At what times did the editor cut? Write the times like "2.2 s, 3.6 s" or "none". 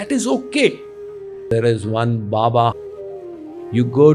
1.5 s, 3.0 s

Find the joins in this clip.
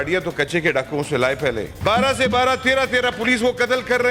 1.8 s

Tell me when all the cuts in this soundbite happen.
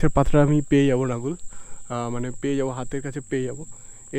none

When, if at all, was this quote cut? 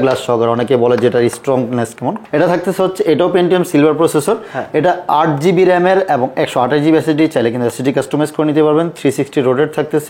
none

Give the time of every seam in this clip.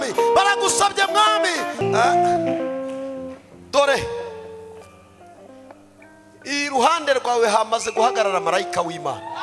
1.8 s

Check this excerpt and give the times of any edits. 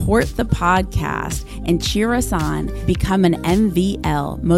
none

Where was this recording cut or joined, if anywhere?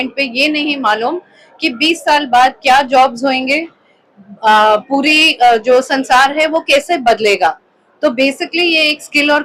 none

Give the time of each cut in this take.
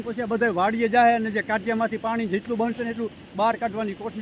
none

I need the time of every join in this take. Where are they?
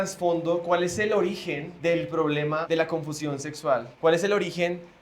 1.7 s, 2.6 s, 3.9 s

